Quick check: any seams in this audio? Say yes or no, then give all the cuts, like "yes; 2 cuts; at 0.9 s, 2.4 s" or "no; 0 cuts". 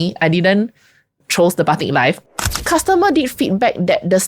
yes; 1 cut; at 2.2 s